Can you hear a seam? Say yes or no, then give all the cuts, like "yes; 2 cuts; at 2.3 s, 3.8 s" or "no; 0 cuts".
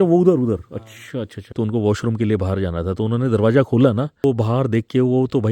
yes; 1 cut; at 1.5 s